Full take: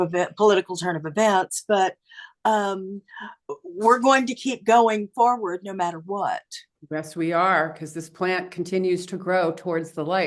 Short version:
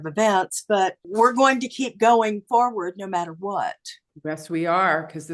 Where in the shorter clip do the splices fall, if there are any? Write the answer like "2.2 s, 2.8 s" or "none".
1.0 s